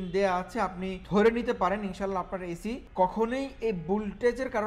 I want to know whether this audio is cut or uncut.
cut